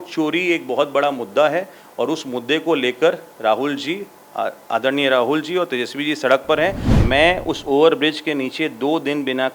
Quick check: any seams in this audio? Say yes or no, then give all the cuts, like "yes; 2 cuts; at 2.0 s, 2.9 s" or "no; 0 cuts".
yes; 1 cut; at 6.9 s